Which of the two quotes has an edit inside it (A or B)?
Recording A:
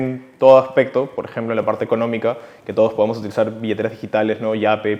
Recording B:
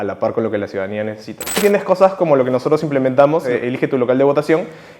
B